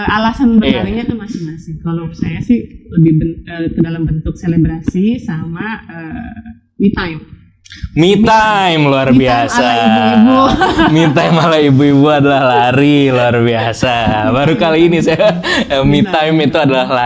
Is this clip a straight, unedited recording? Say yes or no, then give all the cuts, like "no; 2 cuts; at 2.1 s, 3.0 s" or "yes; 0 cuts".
yes; 0 cuts